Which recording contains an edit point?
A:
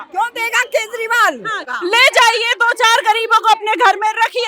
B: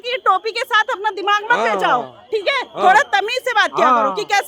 A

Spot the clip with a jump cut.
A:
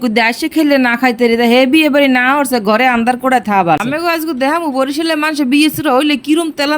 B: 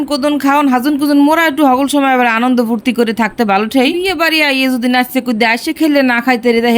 A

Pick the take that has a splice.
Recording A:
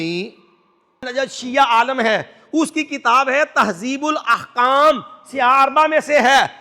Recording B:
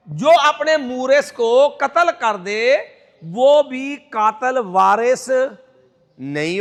A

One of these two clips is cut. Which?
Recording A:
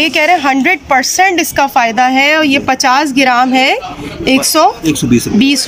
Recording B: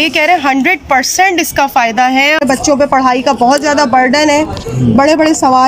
B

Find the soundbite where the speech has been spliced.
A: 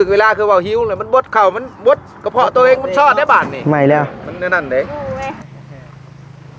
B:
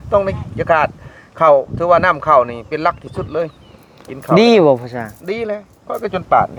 A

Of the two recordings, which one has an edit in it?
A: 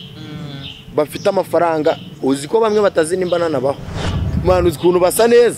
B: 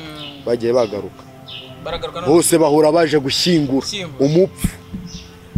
A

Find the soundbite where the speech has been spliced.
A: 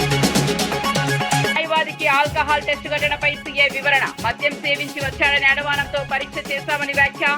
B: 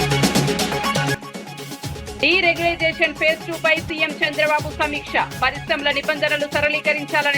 B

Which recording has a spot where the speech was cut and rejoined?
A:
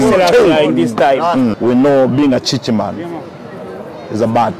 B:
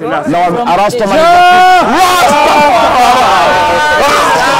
A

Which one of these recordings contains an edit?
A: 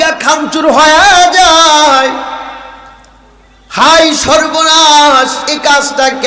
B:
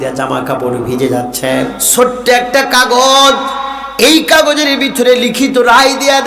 B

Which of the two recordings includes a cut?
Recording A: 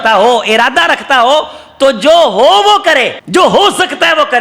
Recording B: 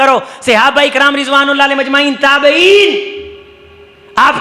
A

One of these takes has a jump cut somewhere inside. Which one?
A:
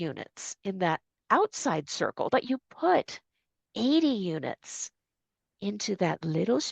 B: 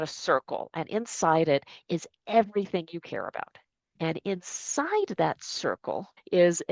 A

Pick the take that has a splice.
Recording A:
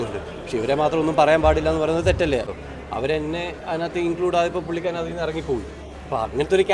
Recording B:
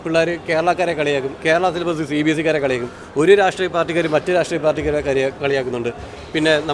A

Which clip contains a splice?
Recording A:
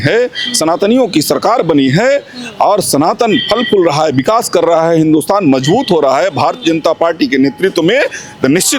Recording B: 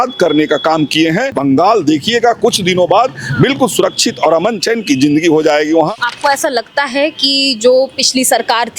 B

